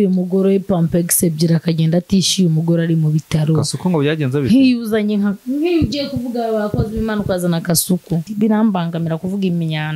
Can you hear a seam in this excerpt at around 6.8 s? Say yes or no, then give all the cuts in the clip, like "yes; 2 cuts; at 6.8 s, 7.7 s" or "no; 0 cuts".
no; 1 cut; at 8.2 s